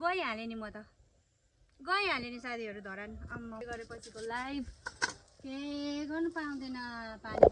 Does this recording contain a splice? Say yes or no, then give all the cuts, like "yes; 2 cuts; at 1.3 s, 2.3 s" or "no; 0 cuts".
yes; 1 cut; at 3.6 s